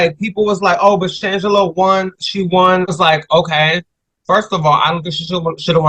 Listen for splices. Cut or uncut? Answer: cut